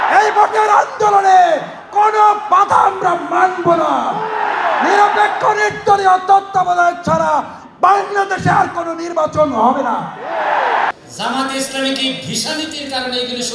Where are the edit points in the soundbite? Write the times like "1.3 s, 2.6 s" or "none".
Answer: 10.9 s